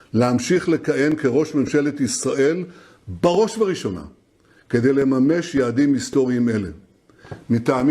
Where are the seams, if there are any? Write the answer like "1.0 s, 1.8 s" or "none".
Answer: 5.5 s